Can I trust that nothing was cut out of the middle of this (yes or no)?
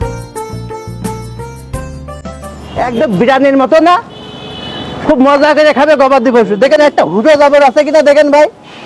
yes